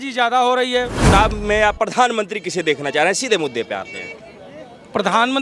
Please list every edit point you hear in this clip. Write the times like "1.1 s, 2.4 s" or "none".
0.9 s